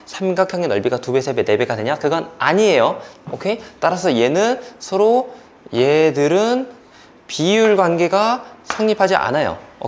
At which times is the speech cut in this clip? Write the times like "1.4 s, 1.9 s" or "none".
none